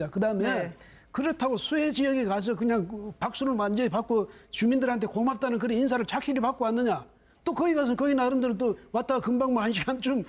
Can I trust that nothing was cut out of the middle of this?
no; 1 cut; at 6.6 s

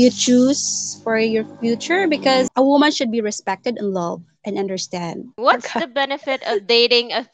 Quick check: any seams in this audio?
yes; 2 cuts; at 2.5 s, 5.3 s

